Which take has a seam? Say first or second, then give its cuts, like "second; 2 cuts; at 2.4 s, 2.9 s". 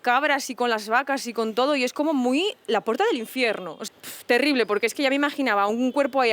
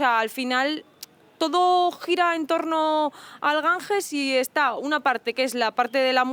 first; 1 cut; at 3.7 s